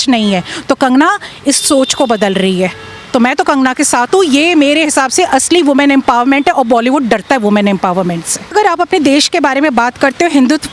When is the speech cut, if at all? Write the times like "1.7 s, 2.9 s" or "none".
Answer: 8.5 s